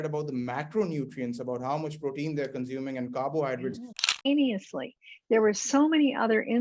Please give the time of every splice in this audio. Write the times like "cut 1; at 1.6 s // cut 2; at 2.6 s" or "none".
cut 1; at 4.2 s